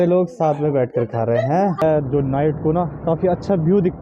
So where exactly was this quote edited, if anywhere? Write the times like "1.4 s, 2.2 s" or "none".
1.8 s

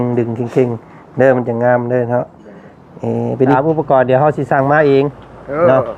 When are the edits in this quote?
3.5 s

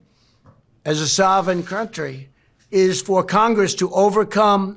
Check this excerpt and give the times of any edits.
none

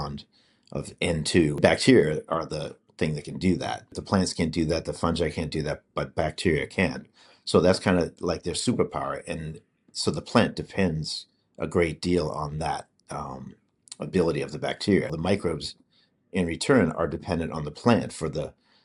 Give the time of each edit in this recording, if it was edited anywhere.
1.6 s, 4.0 s, 15.2 s

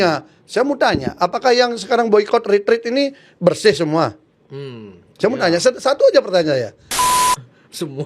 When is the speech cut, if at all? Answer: 7.2 s

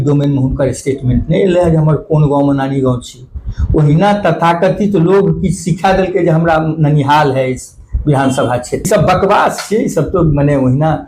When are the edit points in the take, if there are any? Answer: 8.9 s

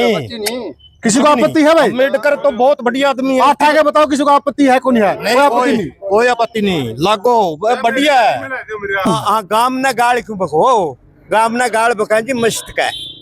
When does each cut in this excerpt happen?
9.1 s

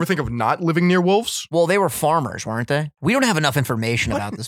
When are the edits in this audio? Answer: 1.4 s, 2.9 s

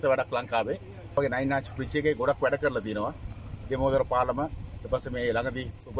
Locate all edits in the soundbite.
1.2 s

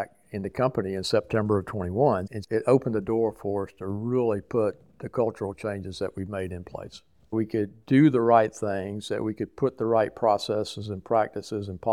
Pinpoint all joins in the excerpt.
2.3 s, 7.3 s

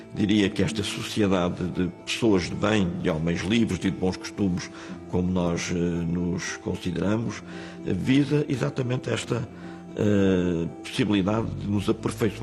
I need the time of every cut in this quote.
9.6 s

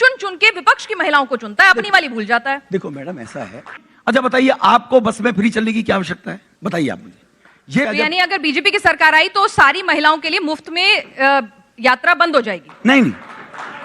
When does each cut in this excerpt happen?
3.9 s, 7.8 s

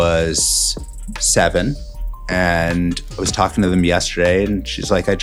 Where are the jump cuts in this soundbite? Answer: none

